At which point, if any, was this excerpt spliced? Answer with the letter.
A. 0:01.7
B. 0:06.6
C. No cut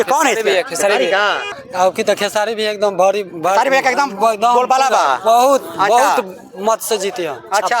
A